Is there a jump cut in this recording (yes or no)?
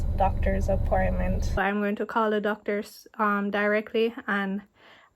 yes